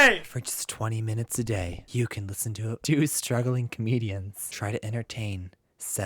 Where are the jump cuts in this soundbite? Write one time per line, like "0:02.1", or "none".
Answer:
0:01.8
0:02.8
0:04.4